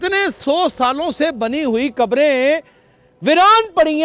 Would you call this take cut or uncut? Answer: uncut